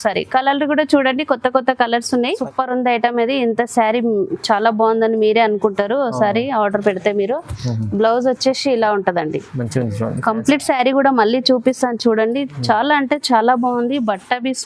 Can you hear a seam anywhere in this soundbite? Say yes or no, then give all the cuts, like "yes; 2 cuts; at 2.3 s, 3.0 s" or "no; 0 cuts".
yes; 1 cut; at 2.4 s